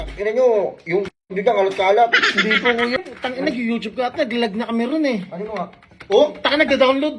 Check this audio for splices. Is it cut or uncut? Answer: cut